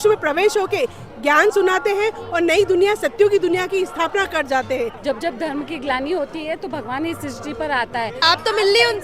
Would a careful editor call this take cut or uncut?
cut